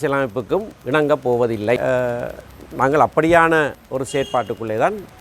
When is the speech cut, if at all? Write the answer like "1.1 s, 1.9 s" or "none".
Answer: 1.8 s